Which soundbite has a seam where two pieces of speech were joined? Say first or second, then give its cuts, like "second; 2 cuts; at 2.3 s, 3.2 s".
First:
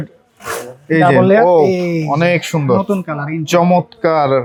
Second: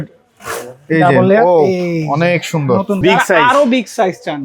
second; 1 cut; at 3.0 s